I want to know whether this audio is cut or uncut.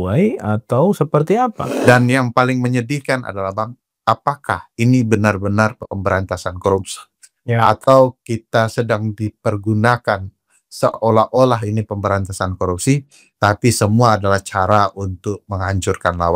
cut